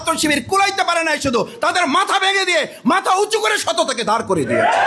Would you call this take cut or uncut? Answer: uncut